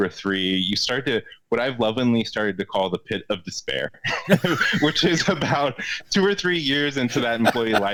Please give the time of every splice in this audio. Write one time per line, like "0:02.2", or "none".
none